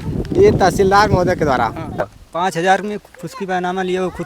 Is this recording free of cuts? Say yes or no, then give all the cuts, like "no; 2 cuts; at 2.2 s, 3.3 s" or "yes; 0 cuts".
no; 1 cut; at 2.2 s